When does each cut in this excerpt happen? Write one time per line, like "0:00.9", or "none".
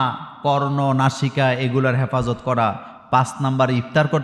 none